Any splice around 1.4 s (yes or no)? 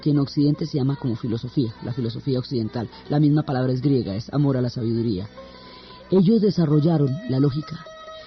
yes